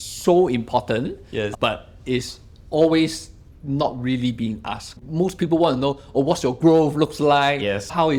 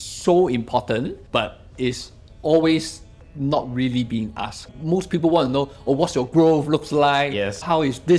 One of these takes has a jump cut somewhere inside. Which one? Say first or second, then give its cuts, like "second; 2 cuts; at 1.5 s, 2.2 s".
second; 1 cut; at 1.3 s